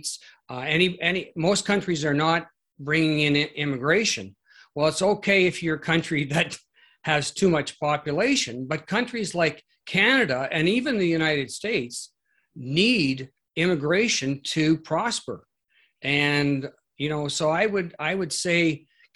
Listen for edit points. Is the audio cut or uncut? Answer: uncut